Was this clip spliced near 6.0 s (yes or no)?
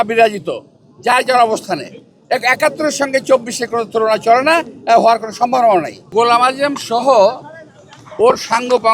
yes